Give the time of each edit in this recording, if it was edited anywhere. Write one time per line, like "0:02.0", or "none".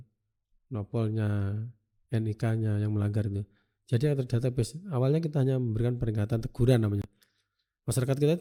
none